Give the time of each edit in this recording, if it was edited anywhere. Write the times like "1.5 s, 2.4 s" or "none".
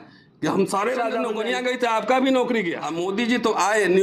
1.3 s, 2.8 s